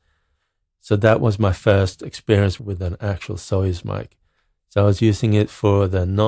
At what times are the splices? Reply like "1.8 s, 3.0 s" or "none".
2.6 s